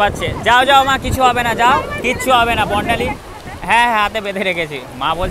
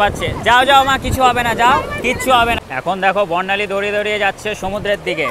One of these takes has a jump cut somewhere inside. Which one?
second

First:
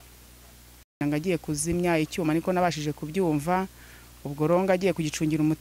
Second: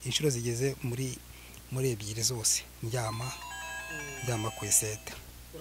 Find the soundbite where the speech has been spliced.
first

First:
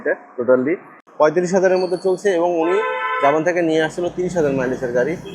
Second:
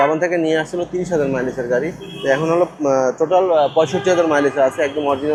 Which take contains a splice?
first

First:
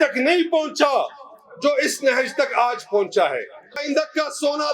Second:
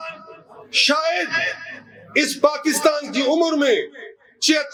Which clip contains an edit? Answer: first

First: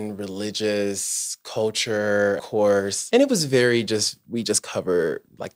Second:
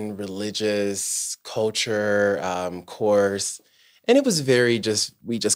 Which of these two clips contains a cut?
first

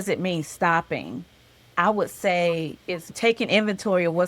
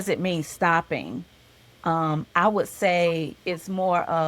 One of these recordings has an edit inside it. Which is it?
first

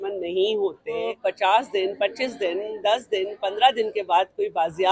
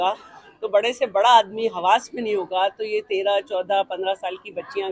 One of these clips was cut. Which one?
first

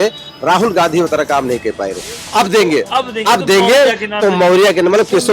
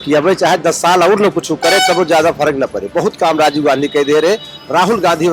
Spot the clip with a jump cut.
first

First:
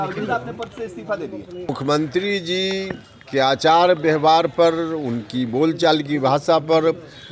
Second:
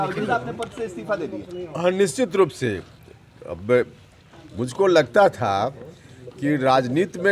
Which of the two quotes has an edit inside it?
first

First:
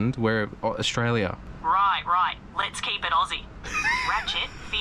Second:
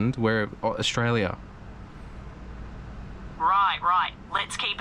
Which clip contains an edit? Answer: first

